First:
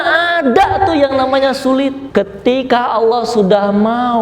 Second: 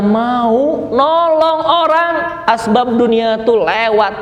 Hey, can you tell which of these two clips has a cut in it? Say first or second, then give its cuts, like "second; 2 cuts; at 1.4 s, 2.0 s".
first; 1 cut; at 2.0 s